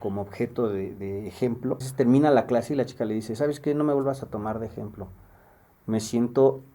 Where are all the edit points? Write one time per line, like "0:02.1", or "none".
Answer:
0:01.8